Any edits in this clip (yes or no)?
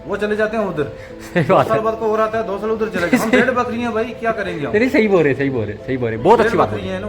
no